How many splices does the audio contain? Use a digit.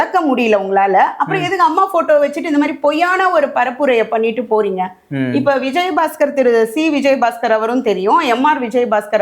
0